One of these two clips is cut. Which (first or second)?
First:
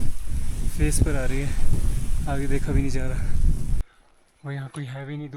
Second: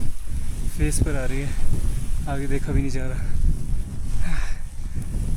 first